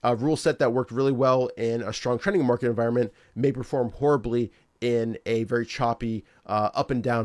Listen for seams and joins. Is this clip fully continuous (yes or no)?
yes